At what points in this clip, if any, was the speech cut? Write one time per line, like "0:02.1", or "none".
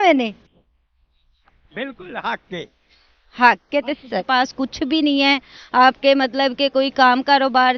0:04.2